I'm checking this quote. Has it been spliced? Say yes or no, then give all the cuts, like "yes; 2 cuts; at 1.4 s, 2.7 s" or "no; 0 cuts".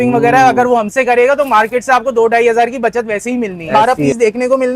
yes; 1 cut; at 3.6 s